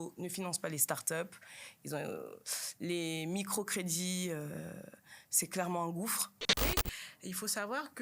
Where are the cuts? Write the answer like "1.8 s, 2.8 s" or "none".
6.5 s